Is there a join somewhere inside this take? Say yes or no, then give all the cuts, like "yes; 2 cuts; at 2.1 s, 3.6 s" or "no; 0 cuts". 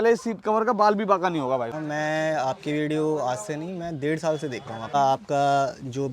yes; 2 cuts; at 1.8 s, 4.9 s